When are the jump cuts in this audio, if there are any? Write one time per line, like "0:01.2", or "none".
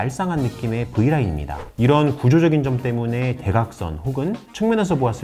0:01.7